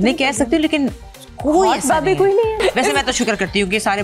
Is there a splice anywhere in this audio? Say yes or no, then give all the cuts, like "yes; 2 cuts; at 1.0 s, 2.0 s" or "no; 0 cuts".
yes; 1 cut; at 2.6 s